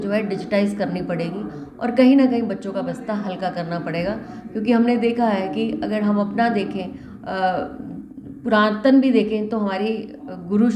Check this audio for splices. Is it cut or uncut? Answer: uncut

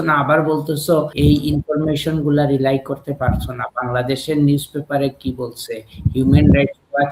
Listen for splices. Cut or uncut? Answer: cut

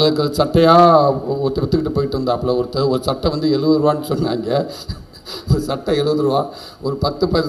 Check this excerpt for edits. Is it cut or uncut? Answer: uncut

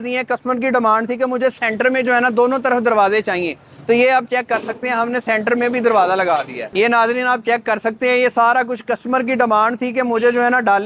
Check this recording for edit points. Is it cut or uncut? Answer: cut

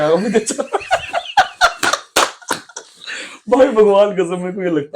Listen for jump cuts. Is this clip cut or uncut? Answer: uncut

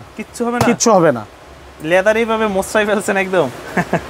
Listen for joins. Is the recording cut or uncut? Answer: uncut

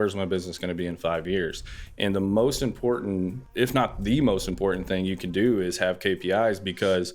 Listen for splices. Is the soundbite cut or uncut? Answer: cut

